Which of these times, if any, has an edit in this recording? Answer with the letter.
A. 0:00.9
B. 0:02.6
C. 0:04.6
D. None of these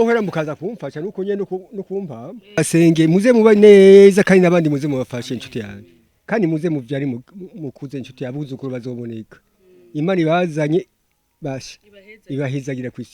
B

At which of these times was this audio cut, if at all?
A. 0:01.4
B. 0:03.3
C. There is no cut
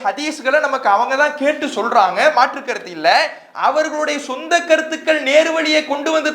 C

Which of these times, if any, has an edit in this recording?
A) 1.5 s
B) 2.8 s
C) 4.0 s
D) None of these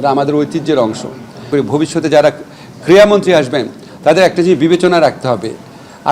A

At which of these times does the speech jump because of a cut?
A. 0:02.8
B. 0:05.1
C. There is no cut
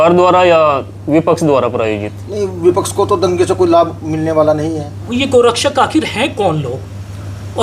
B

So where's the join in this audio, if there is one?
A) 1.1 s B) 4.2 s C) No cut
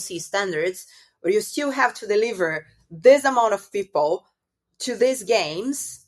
C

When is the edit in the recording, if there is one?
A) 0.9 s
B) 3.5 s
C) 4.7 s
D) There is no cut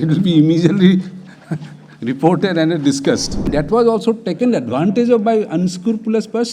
B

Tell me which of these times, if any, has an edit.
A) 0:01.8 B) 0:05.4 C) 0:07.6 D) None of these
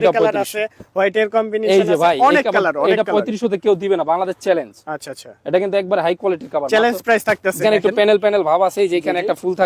C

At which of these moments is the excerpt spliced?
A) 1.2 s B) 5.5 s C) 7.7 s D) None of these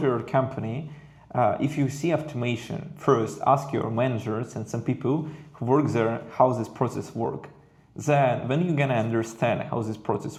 D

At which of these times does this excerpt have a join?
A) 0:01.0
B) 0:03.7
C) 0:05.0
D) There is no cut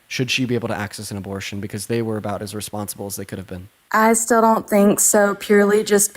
B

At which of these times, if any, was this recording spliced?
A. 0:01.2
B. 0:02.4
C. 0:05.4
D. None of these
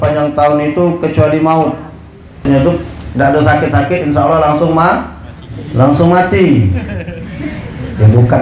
B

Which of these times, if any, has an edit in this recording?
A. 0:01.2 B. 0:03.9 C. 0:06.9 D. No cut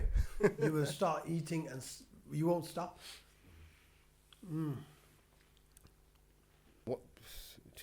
C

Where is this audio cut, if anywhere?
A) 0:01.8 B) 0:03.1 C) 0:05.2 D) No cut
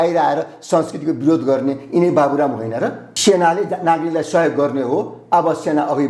B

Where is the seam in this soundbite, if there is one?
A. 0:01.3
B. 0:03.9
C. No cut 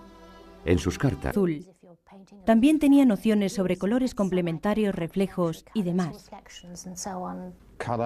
C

